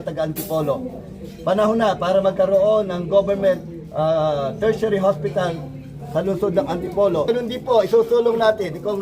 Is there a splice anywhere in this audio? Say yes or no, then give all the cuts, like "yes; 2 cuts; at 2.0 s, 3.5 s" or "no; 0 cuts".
yes; 1 cut; at 7.3 s